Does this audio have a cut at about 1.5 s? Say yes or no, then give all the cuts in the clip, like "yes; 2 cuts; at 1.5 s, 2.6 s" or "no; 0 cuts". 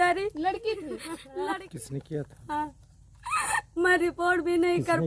yes; 1 cut; at 1.5 s